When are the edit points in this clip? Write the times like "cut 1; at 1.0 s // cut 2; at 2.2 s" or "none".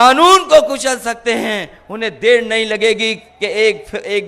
none